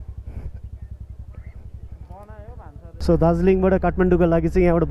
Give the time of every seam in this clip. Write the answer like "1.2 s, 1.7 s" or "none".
3.0 s